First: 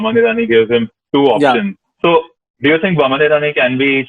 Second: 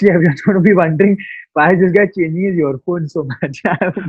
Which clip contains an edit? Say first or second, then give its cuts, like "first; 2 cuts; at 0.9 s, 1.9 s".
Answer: first; 1 cut; at 1.8 s